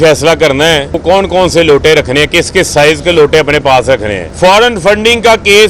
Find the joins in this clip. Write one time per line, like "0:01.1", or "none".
0:01.0
0:04.2